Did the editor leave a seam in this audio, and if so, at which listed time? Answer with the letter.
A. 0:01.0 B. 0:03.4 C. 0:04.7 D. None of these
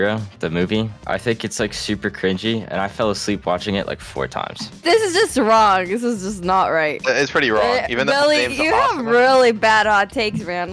C